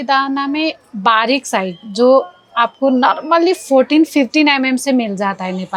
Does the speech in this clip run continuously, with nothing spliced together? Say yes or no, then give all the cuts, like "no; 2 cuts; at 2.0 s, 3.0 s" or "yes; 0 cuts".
yes; 0 cuts